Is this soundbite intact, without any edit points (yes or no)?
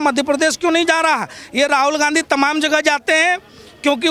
yes